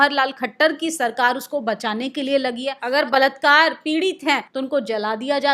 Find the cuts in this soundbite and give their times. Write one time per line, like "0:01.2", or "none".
0:02.8
0:04.5